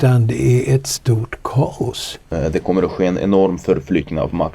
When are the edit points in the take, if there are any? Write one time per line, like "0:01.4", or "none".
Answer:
0:02.3